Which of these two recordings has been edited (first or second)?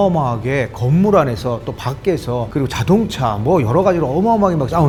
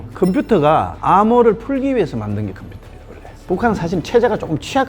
second